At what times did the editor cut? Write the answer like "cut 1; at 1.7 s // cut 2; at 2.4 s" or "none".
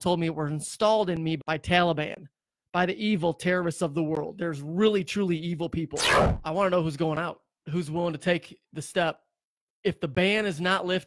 cut 1; at 1.4 s // cut 2; at 6.2 s